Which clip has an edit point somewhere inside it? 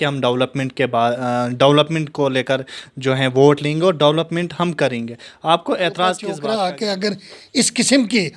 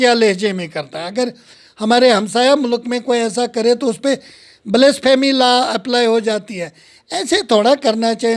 first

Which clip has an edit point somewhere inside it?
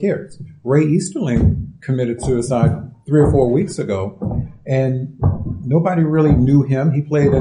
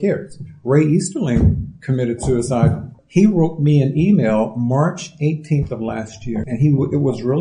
second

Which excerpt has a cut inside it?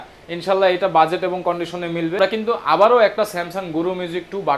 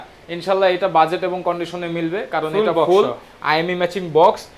first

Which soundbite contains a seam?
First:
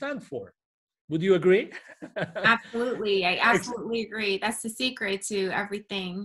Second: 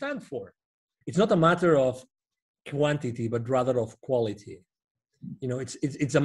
second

